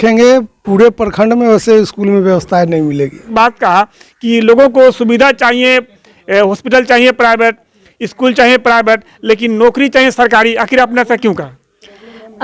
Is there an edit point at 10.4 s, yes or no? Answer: no